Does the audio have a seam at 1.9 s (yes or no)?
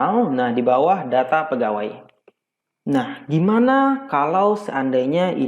no